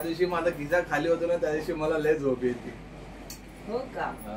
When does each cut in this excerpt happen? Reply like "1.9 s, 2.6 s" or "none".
3.2 s